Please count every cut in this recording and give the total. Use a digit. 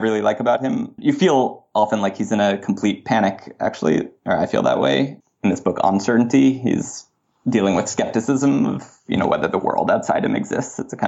1